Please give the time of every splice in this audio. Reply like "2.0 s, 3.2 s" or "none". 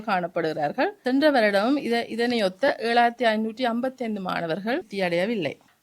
1.0 s, 4.9 s

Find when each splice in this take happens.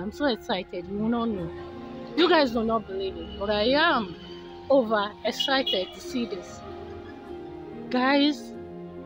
6.4 s, 7.9 s, 8.4 s

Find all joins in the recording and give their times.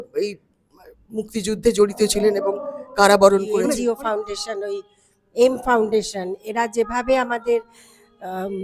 3.7 s

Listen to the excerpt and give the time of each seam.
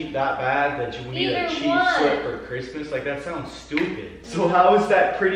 4.2 s

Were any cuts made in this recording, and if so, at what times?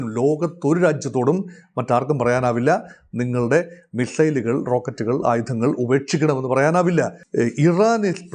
7.2 s

